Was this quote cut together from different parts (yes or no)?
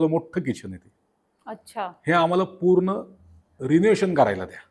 no